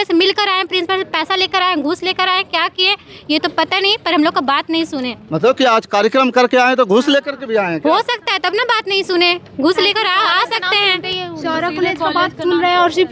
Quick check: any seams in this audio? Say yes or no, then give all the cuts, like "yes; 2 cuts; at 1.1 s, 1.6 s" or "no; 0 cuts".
no; 0 cuts